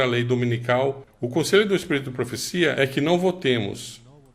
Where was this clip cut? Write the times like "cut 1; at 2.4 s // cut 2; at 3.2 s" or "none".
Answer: cut 1; at 1.1 s